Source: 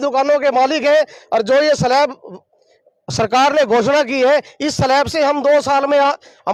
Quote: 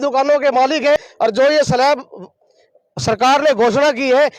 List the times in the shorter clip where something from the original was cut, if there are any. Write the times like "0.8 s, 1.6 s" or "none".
1.0 s

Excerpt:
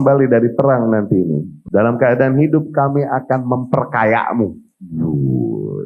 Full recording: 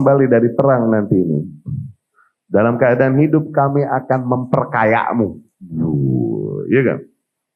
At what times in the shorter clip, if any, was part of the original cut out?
1.5 s

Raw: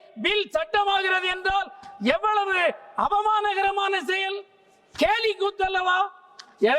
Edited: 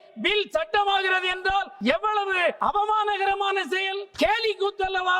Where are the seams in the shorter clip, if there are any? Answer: 1.7 s, 2.6 s, 4.0 s

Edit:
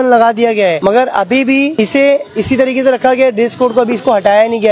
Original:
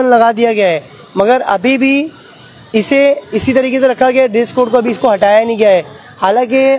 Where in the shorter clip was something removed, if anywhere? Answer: 0.8 s, 1.7 s

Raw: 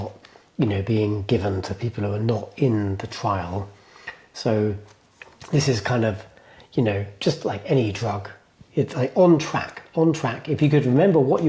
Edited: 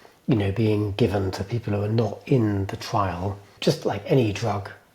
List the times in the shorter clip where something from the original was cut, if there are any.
3.5 s

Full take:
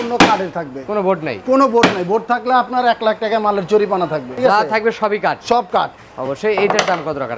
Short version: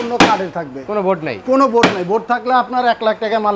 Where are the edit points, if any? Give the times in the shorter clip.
none

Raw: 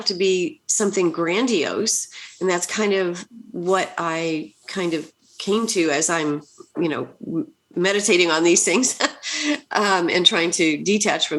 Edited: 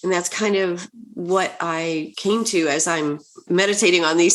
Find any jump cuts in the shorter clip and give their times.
2.1 s, 3.3 s

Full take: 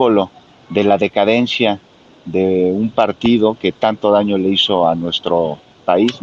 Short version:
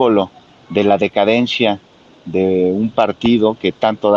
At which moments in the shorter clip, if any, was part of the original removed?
none

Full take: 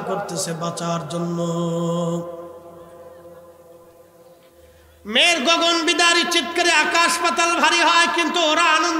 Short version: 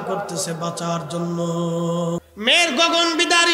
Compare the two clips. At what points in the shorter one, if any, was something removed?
2.3 s

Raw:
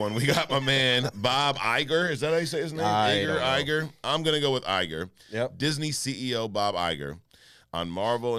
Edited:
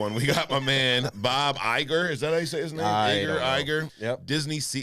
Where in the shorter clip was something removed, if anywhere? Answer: 3.9 s

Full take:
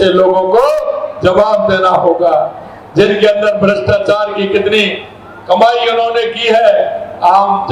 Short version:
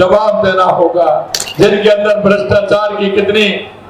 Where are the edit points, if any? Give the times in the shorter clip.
1.4 s

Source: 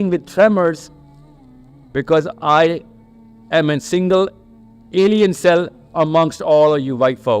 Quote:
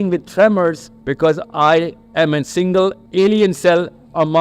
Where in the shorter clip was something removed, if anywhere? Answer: 0.9 s, 2.0 s, 3.0 s

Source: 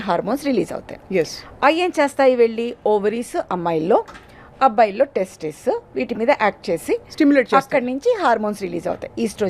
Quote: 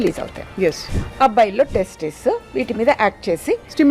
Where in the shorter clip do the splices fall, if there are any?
0.9 s

